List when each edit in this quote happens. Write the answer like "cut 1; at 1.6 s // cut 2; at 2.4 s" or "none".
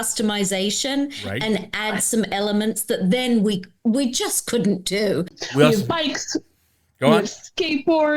cut 1; at 5.4 s